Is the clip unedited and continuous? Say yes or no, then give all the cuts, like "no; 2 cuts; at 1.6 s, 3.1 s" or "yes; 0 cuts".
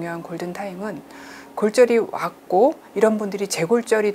yes; 0 cuts